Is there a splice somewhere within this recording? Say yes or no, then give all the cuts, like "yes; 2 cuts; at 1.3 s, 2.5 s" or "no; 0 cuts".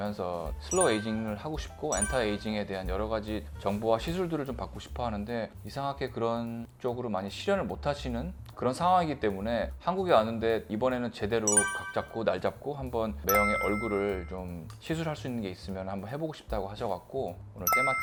no; 0 cuts